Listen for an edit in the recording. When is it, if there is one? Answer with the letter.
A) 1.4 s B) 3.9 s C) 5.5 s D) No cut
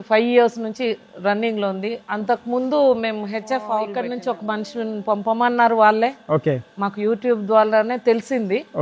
B